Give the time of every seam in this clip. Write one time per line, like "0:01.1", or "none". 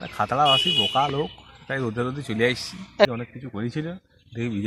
0:03.1